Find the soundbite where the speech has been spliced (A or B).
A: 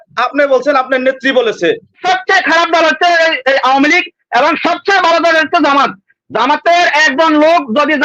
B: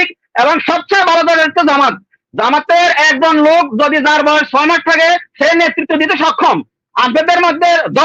A